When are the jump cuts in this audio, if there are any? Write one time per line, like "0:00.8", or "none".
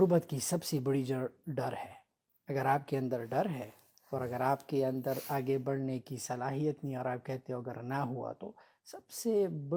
none